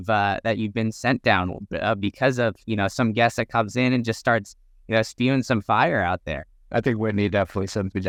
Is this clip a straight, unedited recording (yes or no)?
yes